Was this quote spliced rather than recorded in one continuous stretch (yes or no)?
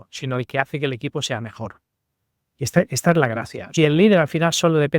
yes